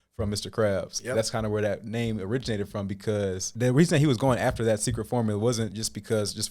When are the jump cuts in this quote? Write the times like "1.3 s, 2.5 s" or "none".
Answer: 3.5 s